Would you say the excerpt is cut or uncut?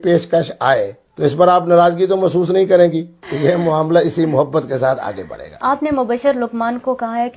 cut